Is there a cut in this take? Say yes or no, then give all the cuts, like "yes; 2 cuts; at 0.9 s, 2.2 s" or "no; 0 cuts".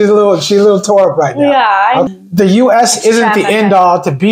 yes; 1 cut; at 2.1 s